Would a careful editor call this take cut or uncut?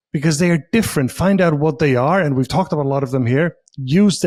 uncut